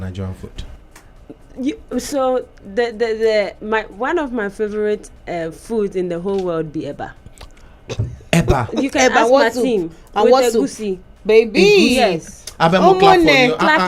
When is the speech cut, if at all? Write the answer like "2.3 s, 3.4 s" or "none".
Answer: none

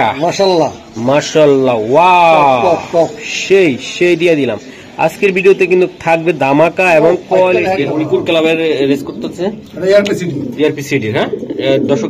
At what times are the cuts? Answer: 7.8 s

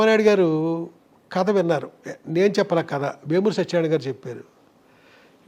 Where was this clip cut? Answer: none

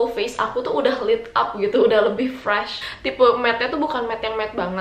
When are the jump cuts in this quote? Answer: 2.7 s

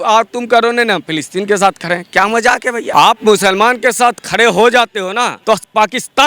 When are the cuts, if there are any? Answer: 2.9 s, 5.4 s

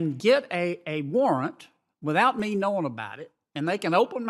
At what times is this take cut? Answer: none

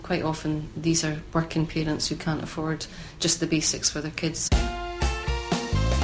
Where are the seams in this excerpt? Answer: 4.5 s

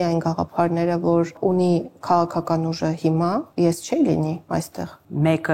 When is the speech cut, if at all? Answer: 1.3 s, 3.5 s, 4.7 s

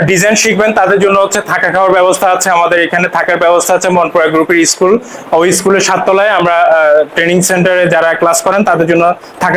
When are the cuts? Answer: none

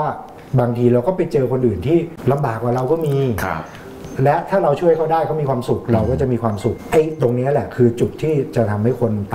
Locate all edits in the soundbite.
6.8 s

